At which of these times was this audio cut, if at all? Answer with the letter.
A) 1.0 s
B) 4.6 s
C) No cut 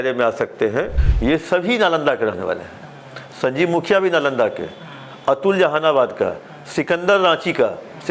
A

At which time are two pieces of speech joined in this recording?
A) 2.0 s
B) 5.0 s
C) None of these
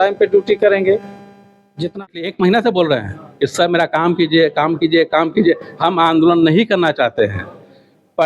A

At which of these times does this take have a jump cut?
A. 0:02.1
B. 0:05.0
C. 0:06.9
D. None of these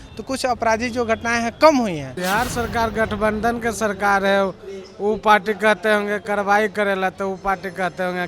A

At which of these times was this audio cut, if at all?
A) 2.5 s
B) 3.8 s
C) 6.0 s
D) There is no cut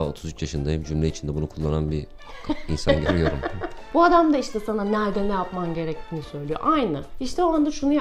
B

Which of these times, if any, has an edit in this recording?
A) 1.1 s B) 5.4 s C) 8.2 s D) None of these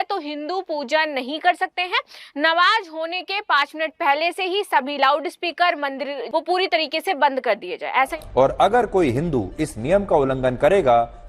C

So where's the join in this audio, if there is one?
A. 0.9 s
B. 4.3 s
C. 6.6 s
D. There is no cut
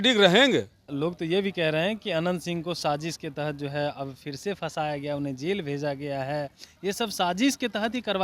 A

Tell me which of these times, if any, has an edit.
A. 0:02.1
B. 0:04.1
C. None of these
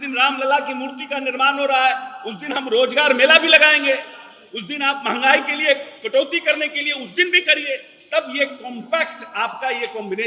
C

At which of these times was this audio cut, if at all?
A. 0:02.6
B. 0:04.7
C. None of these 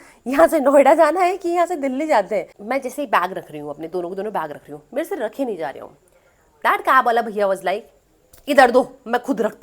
A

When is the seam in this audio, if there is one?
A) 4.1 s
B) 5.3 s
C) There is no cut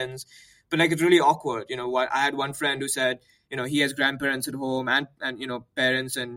C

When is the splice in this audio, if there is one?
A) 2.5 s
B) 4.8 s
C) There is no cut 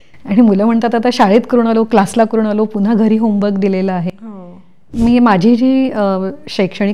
B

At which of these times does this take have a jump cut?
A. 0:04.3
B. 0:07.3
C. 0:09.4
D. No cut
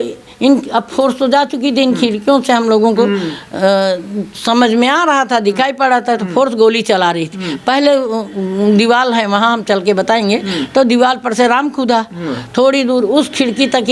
D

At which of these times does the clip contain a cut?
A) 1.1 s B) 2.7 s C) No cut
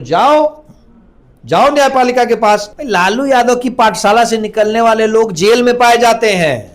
B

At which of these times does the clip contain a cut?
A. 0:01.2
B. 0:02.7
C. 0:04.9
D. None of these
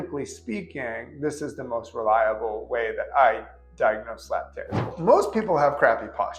C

